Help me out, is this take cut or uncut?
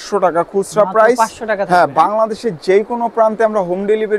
uncut